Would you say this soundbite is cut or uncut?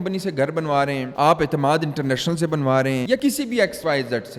uncut